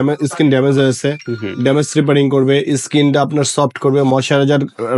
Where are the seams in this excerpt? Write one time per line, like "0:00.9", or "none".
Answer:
none

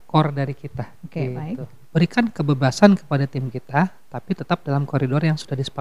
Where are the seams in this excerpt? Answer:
0:01.7

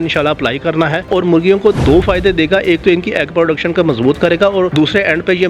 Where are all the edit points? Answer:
0:01.1

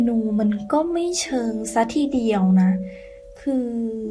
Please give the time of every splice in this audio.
none

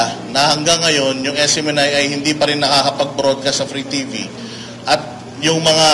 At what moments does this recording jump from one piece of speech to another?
none

